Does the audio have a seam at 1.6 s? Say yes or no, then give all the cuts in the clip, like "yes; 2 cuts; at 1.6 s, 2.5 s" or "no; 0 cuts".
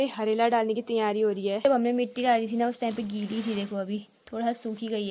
yes; 1 cut; at 1.6 s